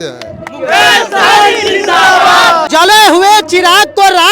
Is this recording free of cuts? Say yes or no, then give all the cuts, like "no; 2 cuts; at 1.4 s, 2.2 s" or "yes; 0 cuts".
no; 1 cut; at 2.7 s